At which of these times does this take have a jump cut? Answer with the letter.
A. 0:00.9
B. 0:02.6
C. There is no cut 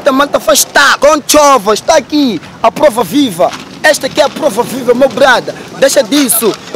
A